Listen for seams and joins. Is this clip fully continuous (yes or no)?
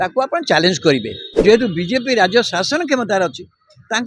no